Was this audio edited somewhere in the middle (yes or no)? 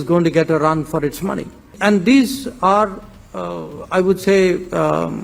yes